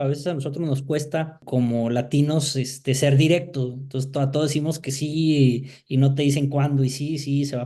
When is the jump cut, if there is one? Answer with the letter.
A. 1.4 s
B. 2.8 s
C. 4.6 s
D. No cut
A